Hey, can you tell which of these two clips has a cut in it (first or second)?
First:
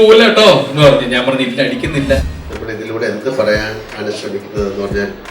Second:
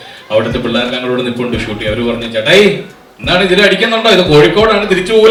first